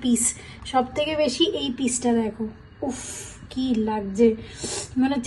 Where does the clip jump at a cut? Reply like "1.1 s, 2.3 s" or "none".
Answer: none